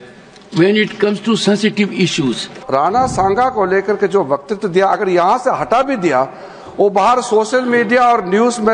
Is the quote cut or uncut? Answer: cut